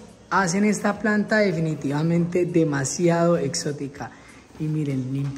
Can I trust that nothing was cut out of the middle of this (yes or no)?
yes